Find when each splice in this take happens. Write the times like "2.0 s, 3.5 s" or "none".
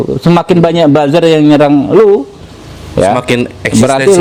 none